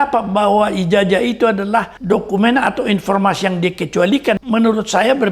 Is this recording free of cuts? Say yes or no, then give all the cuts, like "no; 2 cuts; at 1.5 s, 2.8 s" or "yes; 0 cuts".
no; 2 cuts; at 1.9 s, 4.4 s